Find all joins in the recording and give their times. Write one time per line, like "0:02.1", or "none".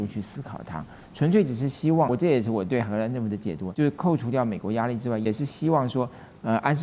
0:02.1
0:03.6
0:05.3